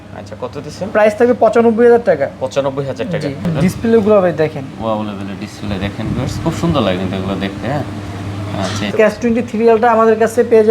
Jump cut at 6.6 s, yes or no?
no